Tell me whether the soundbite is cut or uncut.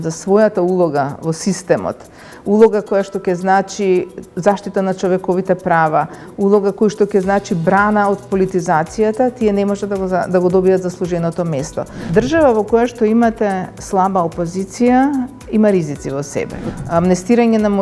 cut